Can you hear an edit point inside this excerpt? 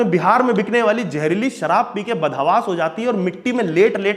no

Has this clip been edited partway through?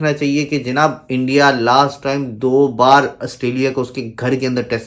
no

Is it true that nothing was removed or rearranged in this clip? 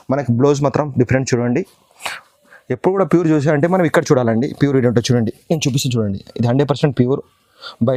yes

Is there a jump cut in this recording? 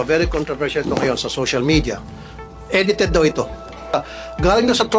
yes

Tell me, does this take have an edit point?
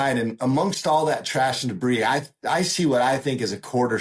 no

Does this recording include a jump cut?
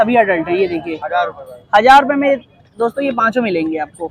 yes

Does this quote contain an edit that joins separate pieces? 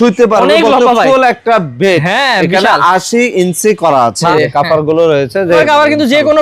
yes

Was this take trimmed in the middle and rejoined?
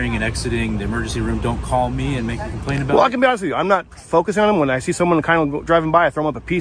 no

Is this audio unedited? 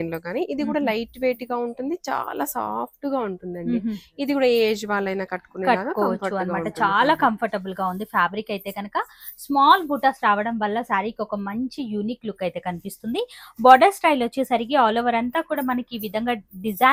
yes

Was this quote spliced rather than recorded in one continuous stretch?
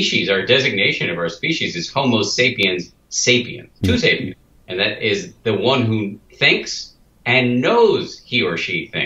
yes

